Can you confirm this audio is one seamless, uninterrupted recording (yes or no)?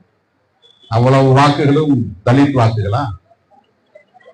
yes